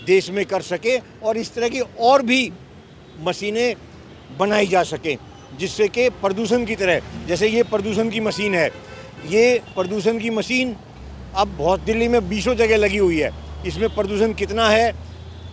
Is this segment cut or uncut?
uncut